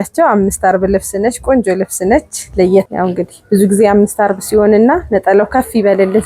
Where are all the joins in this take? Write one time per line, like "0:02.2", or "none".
0:02.9